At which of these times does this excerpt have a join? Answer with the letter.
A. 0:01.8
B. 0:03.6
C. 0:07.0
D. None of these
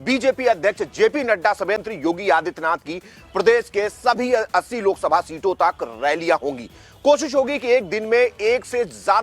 A